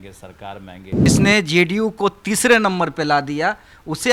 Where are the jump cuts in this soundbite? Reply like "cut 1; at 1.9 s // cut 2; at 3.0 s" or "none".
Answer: cut 1; at 1.1 s